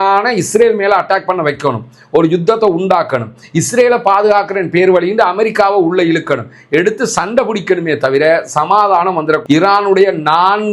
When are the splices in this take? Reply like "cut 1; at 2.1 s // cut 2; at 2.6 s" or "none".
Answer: cut 1; at 9.4 s